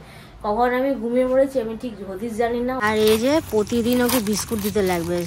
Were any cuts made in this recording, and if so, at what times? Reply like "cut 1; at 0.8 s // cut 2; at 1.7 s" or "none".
cut 1; at 2.8 s

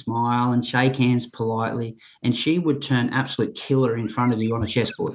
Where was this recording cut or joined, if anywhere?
none

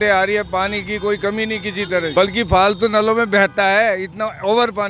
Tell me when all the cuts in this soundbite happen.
cut 1; at 2.1 s

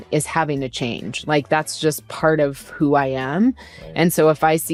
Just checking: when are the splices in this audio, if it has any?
none

